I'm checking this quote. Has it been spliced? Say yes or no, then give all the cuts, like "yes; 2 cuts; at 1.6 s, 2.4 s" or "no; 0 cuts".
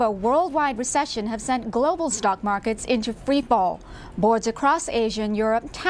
no; 0 cuts